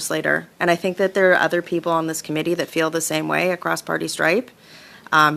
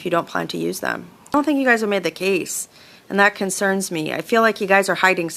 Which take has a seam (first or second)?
second